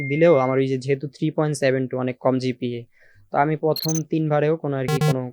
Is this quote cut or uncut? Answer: uncut